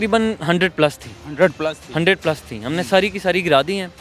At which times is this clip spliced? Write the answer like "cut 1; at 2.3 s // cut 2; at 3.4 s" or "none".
none